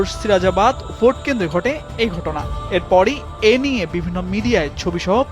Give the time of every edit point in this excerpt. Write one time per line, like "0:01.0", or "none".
none